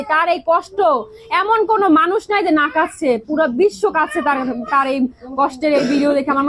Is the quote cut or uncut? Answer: uncut